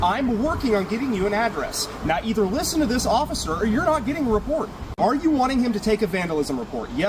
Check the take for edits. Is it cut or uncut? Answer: cut